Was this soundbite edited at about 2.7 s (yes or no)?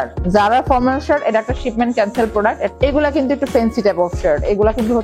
yes